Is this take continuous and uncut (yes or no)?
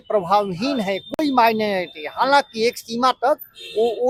yes